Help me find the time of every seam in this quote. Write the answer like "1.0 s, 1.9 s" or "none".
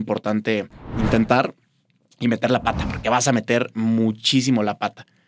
none